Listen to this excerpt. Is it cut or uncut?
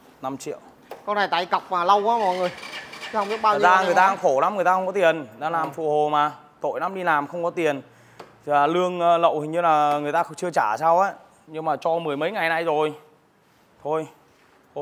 uncut